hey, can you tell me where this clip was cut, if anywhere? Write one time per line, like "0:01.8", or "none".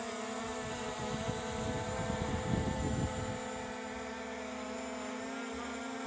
none